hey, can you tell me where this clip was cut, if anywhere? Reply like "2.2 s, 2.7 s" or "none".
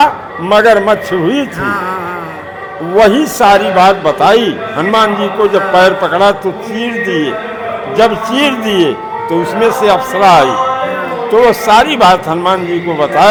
none